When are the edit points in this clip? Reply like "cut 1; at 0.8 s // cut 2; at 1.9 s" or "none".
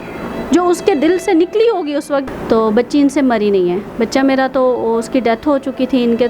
cut 1; at 2.3 s